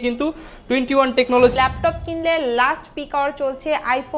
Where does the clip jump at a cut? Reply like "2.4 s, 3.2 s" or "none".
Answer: 1.5 s